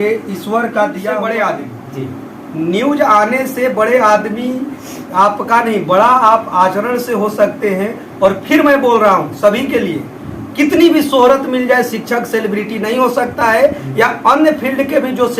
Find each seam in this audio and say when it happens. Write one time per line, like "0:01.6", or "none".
0:01.1